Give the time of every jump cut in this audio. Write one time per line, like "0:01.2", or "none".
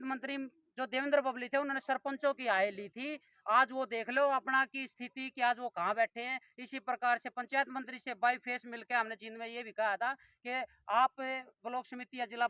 none

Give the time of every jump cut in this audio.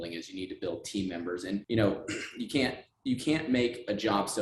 0:01.6

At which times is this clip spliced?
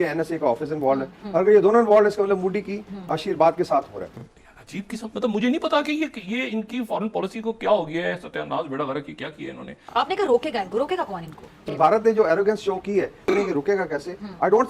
0:04.0
0:09.7
0:11.6
0:13.2

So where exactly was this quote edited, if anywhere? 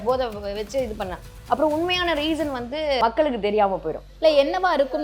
0:03.0
0:04.1

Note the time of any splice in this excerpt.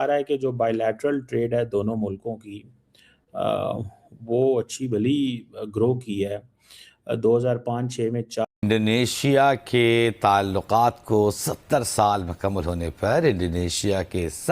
0:08.4

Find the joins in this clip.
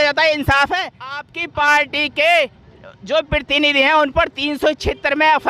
0:01.3

